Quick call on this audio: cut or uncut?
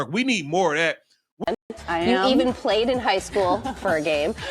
cut